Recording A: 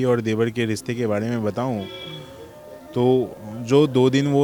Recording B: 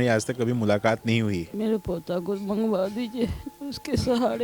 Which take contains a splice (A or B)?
B